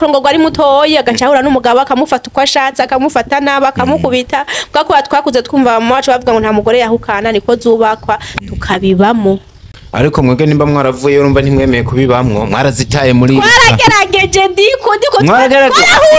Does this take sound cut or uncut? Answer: uncut